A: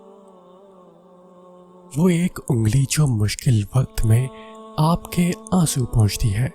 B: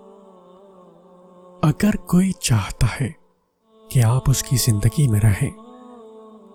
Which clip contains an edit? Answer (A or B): A